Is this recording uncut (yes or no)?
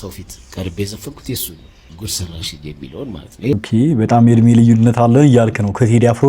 no